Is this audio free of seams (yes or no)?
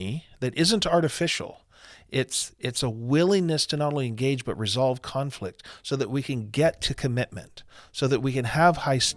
yes